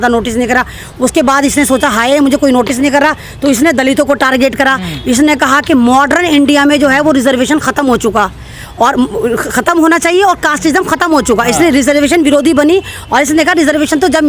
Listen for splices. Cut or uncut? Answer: uncut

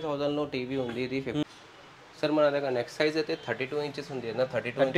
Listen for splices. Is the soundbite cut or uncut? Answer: cut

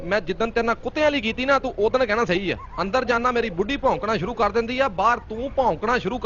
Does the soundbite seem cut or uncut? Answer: uncut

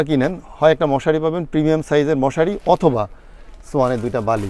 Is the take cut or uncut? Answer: uncut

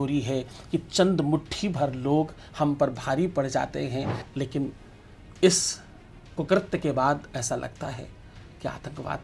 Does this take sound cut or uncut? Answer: cut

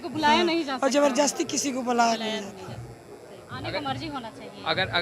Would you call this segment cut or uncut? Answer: uncut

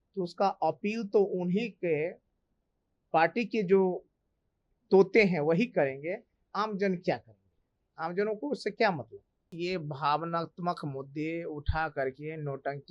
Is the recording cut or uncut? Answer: cut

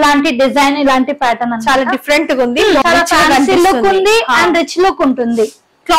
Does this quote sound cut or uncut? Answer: cut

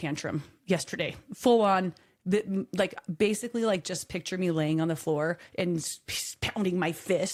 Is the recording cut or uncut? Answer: uncut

